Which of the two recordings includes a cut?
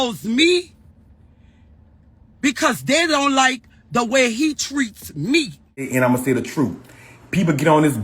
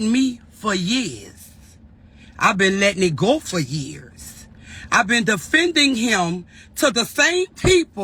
first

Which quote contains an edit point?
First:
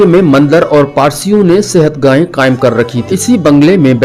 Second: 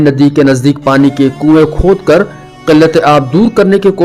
first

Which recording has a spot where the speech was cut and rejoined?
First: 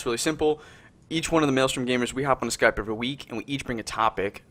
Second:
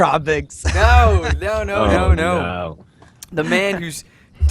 second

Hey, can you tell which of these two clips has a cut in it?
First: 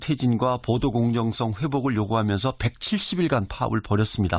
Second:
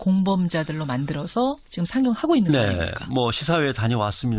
second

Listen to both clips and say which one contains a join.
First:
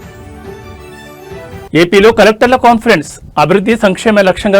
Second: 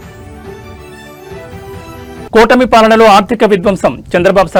first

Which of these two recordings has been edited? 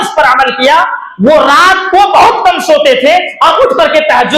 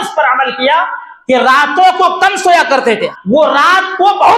first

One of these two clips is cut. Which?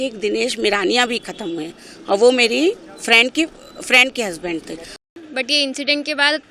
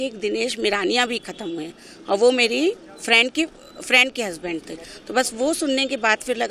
first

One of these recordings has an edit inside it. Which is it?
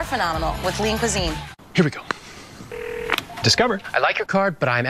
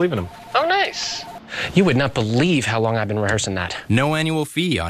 first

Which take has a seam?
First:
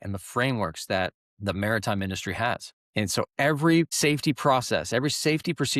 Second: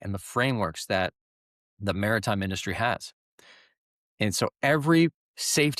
first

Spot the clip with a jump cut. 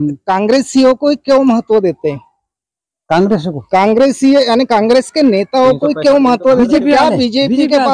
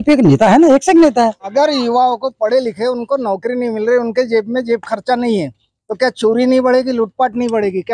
second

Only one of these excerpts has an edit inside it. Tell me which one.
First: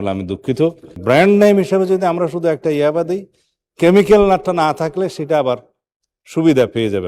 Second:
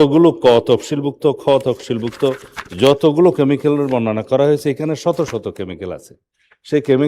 first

